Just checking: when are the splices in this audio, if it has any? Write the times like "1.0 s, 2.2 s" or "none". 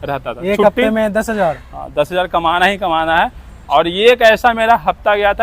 3.5 s